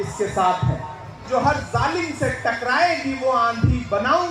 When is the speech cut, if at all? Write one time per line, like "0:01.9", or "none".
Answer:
0:01.2

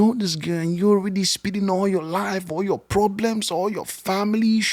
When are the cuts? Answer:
none

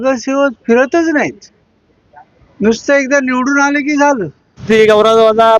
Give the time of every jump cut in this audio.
0:04.6

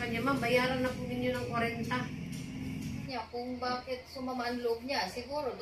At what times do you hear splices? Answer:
0:03.1

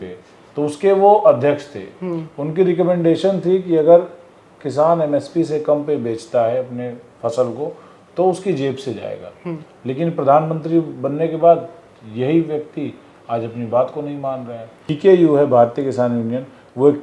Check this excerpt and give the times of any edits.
0:14.9

